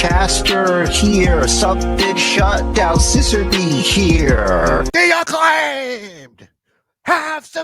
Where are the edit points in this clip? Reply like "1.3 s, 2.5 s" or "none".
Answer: 4.9 s